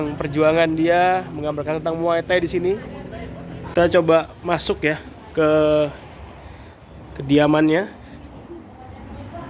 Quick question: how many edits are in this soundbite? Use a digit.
1